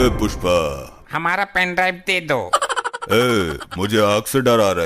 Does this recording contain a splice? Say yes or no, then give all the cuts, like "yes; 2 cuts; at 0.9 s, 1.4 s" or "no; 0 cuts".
yes; 1 cut; at 1.0 s